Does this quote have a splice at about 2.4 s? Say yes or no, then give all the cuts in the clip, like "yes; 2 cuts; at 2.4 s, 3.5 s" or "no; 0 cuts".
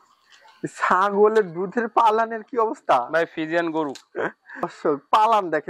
no; 1 cut; at 4.7 s